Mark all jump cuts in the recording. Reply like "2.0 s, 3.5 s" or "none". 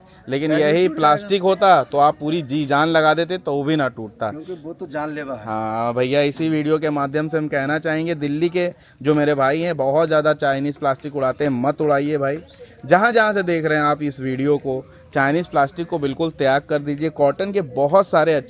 none